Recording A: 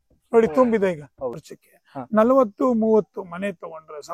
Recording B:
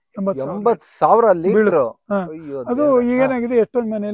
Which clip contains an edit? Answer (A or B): A